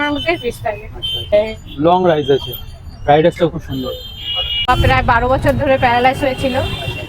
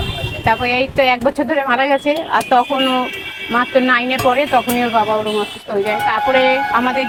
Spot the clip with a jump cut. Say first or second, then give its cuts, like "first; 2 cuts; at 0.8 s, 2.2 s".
first; 2 cuts; at 1.3 s, 4.6 s